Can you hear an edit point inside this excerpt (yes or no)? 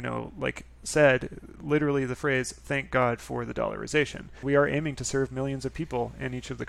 yes